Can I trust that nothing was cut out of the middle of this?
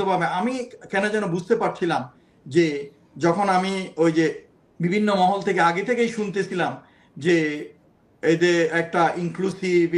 yes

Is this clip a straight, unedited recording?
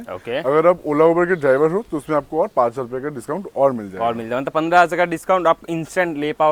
yes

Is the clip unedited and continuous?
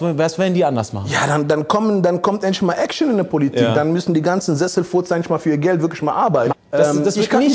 no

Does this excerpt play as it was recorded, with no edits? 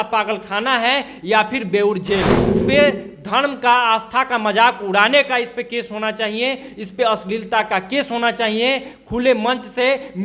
no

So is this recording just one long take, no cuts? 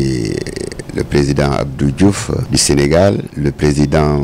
no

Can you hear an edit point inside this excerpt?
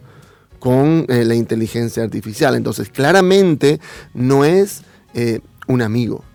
no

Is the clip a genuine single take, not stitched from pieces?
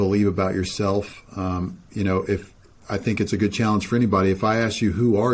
yes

